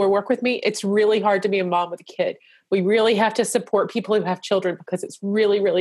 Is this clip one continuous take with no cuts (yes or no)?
yes